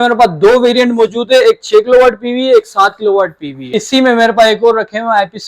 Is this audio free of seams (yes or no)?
no